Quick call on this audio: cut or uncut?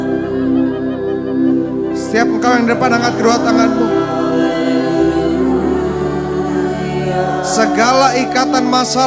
uncut